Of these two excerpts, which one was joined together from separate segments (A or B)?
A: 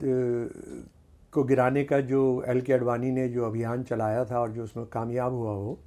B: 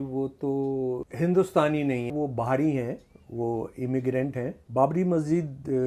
B